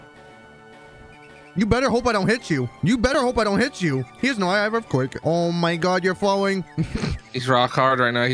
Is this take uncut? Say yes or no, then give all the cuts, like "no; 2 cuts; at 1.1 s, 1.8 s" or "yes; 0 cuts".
no; 2 cuts; at 3.1 s, 5.2 s